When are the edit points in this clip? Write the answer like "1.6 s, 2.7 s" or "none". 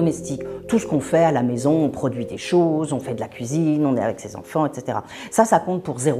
none